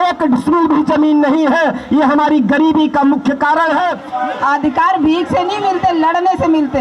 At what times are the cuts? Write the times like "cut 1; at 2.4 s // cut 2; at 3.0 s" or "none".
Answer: cut 1; at 4.0 s